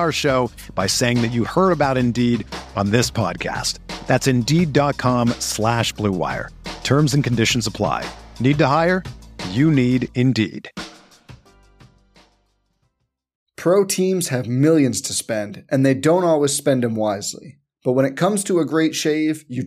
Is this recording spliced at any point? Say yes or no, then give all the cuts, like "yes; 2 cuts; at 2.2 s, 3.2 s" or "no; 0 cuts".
yes; 1 cut; at 13.4 s